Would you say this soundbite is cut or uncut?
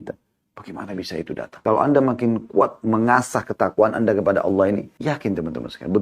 cut